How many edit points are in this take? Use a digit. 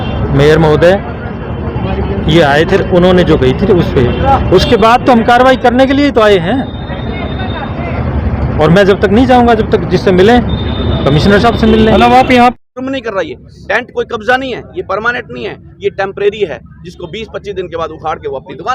1